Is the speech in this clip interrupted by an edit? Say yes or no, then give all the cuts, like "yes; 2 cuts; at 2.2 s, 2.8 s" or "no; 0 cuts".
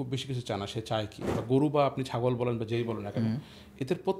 yes; 1 cut; at 1.3 s